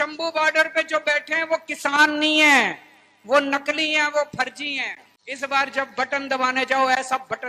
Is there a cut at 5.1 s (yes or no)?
yes